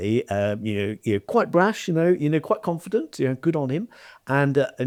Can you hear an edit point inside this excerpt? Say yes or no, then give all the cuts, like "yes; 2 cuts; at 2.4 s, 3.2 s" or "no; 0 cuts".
no; 0 cuts